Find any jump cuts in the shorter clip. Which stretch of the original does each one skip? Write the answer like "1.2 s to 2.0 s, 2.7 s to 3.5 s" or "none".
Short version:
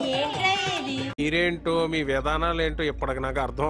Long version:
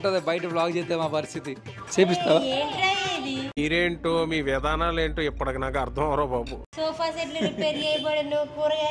none